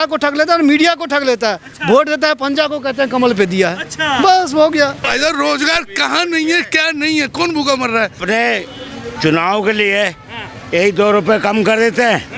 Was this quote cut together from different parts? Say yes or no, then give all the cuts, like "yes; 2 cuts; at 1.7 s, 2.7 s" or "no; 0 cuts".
yes; 2 cuts; at 5.0 s, 8.2 s